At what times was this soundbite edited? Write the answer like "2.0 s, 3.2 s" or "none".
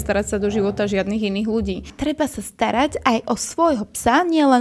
1.9 s